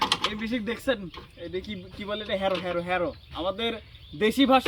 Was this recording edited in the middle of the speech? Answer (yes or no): no